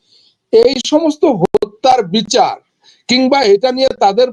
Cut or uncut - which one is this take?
uncut